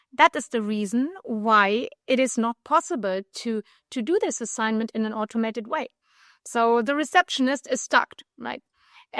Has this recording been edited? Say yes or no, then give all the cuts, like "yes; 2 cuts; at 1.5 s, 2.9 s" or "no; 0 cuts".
no; 0 cuts